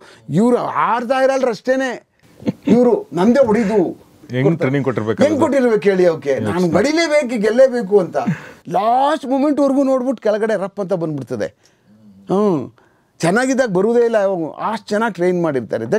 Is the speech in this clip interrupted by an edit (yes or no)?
yes